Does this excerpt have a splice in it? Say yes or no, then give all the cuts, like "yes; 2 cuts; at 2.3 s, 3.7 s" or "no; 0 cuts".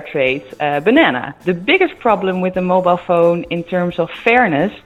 yes; 1 cut; at 1.3 s